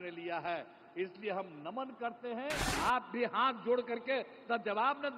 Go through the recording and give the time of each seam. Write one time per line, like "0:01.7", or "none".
0:02.7